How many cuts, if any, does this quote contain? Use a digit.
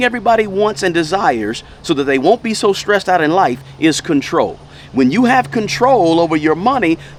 0